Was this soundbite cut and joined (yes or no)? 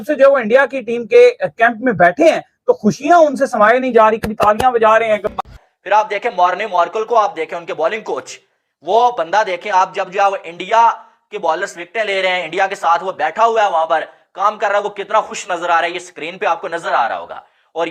yes